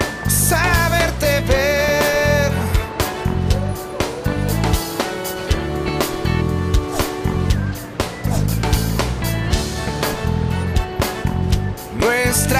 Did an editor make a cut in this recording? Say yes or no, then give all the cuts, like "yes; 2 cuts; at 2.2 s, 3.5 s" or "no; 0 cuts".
no; 0 cuts